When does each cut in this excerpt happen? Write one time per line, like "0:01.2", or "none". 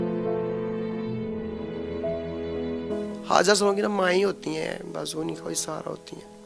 0:02.9